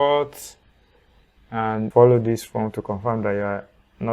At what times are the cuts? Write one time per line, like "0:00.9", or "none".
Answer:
0:01.9

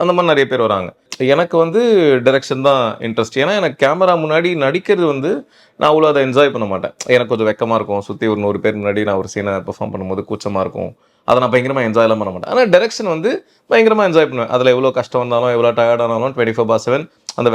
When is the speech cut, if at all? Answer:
0:01.1

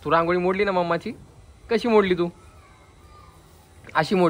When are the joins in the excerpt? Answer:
none

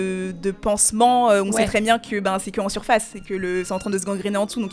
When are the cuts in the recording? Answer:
none

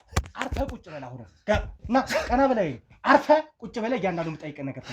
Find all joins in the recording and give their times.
none

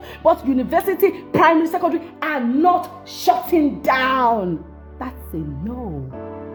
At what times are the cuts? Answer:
none

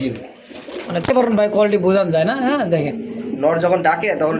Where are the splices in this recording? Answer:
0:01.1

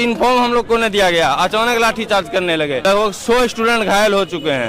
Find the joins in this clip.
0:02.8

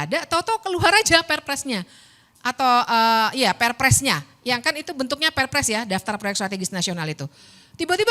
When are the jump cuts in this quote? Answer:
none

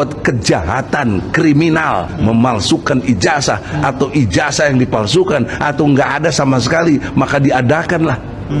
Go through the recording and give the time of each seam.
none

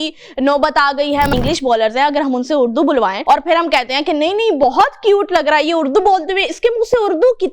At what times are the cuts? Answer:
0:01.3
0:03.2

